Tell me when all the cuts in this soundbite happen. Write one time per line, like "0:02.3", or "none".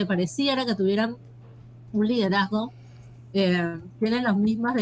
none